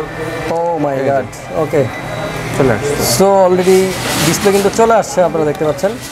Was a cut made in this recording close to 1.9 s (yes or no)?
no